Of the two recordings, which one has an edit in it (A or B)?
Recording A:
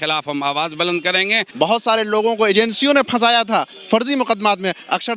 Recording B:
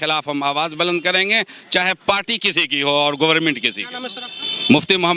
A